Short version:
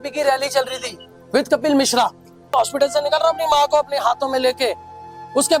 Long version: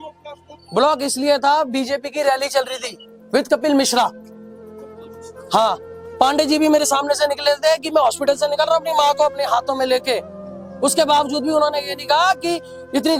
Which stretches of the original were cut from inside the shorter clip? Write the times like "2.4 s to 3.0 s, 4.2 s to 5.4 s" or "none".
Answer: 4.5 s to 8.0 s